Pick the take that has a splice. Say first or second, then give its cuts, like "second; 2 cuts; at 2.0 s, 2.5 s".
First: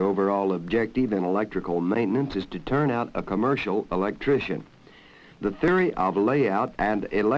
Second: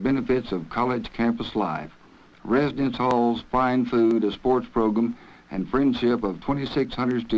second; 1 cut; at 4.1 s